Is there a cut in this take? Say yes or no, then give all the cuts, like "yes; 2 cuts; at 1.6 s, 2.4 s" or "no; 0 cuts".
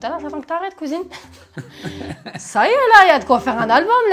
no; 0 cuts